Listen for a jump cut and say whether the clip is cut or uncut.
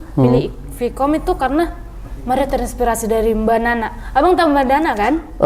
uncut